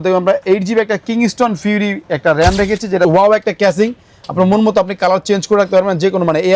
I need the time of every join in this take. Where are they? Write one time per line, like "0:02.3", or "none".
0:03.1